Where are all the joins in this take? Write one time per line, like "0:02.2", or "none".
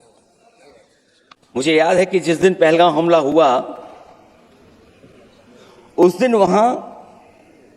0:01.1